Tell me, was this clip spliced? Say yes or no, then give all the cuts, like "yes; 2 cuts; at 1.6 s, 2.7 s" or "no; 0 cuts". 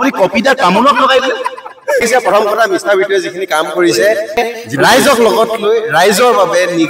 yes; 2 cuts; at 2.0 s, 4.4 s